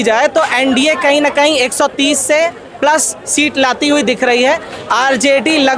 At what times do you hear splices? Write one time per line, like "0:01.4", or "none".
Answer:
none